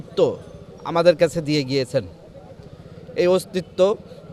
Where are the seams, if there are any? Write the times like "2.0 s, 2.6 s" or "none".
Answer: none